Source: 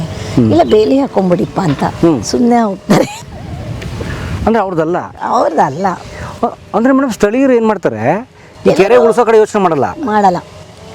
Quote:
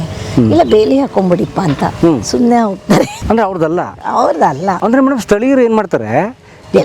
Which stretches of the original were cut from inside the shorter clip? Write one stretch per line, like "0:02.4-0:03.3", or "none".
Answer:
0:03.2-0:04.3
0:05.9-0:06.7